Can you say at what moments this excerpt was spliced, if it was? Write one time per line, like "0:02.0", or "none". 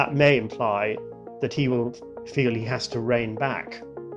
none